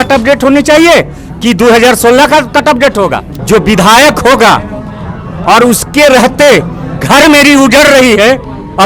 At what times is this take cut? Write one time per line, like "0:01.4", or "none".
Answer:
0:03.3